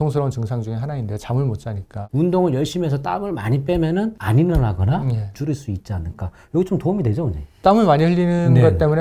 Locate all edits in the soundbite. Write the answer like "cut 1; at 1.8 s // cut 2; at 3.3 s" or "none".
cut 1; at 1.9 s // cut 2; at 5.3 s